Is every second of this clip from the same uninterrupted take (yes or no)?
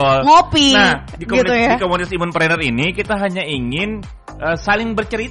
yes